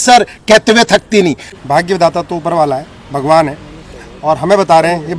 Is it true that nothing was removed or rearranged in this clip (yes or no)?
no